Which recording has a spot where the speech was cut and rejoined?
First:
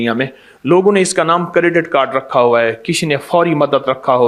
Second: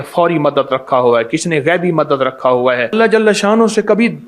second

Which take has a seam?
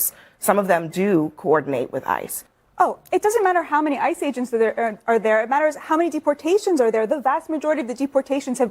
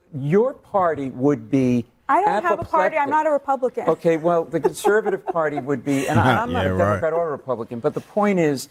first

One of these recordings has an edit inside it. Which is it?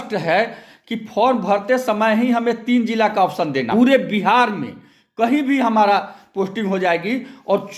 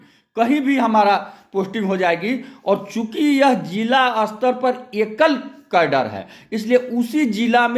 first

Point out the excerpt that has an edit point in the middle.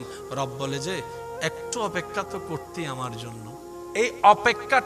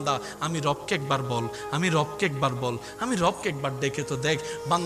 first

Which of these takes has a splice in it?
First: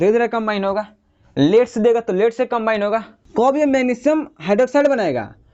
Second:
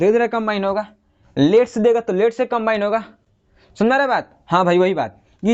first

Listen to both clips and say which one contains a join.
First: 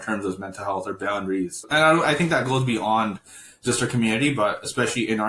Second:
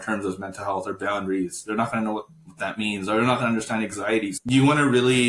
first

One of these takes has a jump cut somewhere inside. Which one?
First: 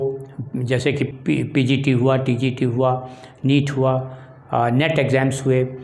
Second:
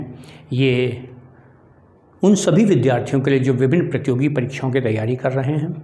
first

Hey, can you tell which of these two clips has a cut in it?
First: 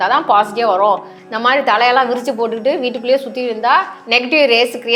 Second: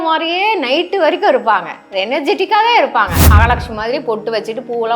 second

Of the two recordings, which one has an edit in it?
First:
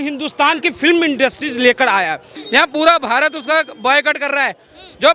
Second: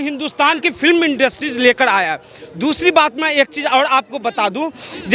first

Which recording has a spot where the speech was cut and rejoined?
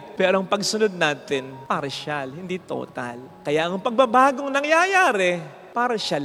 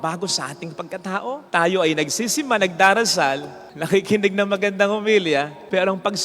second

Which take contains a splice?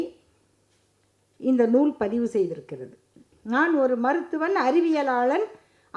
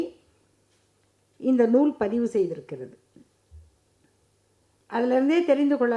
first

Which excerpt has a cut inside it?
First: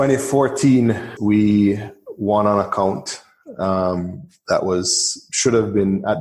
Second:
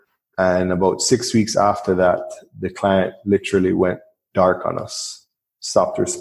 first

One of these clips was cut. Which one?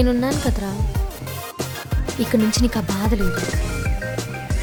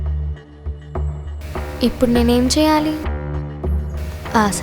second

